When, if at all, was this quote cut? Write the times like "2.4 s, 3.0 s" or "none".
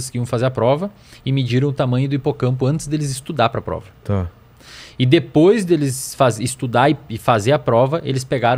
none

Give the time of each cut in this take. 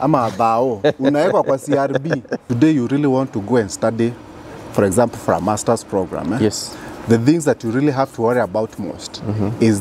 2.5 s

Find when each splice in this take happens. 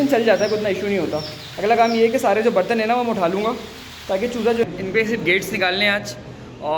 4.6 s

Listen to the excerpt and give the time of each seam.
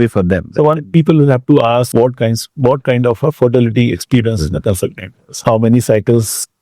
1.9 s, 5.1 s

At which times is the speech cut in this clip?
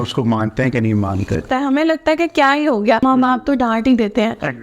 1.4 s, 3.0 s

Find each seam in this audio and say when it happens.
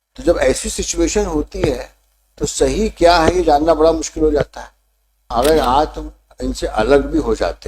5.2 s

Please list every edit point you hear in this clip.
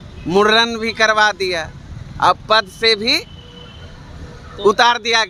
none

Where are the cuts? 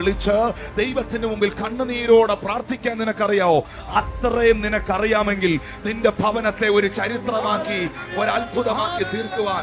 none

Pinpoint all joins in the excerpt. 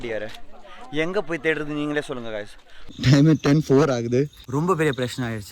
2.9 s, 4.4 s

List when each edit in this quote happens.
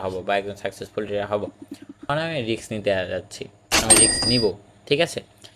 2.0 s

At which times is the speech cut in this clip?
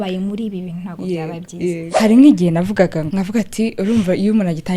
1.9 s, 3.0 s

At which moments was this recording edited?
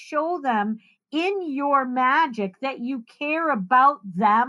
none

